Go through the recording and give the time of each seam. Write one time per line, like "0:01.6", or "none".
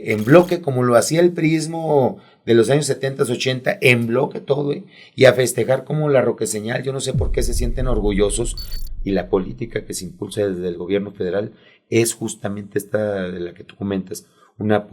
0:08.8